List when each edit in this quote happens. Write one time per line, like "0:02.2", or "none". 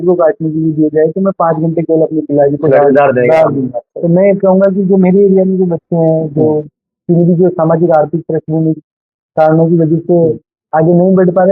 0:03.9